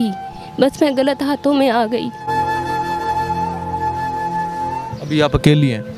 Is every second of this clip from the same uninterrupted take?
no; 1 cut; at 4.9 s

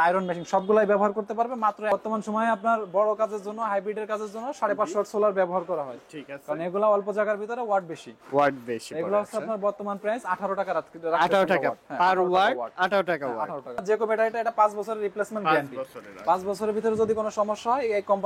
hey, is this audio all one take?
no; 2 cuts; at 1.9 s, 13.8 s

